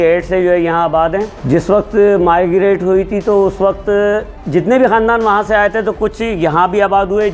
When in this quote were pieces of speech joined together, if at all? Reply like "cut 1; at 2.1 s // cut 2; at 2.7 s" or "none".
cut 1; at 1.4 s // cut 2; at 4.3 s